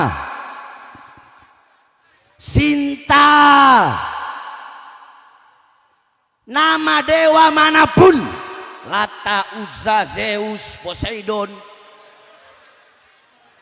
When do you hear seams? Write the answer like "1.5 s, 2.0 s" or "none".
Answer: none